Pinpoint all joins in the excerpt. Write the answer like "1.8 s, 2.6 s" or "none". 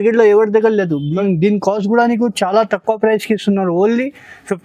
1.2 s